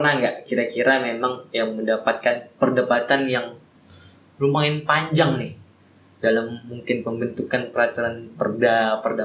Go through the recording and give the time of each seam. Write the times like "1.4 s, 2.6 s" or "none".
none